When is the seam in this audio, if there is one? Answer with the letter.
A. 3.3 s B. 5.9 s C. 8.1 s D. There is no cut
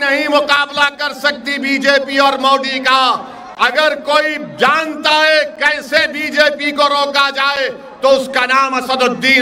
D